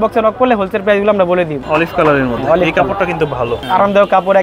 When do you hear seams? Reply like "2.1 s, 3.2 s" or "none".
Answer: 1.6 s, 3.6 s